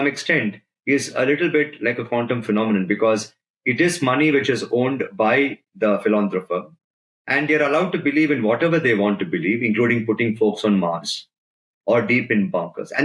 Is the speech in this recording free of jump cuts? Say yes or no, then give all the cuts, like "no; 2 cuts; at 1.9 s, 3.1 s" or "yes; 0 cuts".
yes; 0 cuts